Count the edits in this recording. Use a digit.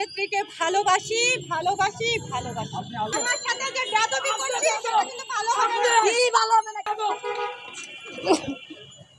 2